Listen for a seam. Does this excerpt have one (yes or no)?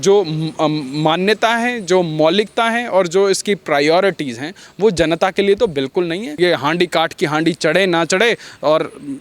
yes